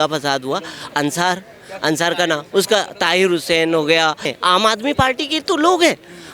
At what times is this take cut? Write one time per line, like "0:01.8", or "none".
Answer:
0:04.3